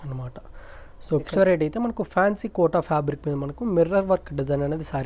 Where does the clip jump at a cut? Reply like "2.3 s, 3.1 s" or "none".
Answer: 1.3 s